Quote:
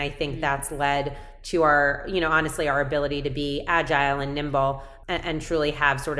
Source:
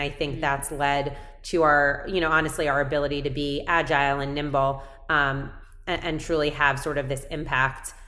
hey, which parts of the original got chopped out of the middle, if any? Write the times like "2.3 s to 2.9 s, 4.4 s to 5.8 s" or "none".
4.9 s to 5.7 s